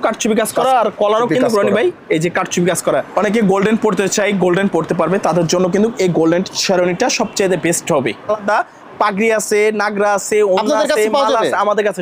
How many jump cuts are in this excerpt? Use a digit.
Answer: 2